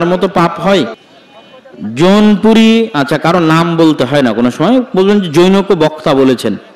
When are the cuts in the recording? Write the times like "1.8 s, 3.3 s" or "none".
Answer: 1.0 s